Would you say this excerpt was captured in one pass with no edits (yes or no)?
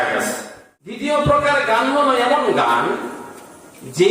no